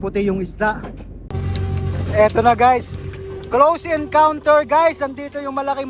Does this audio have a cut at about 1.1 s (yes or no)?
yes